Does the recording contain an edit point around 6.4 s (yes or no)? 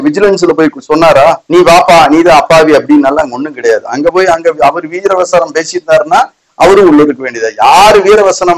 no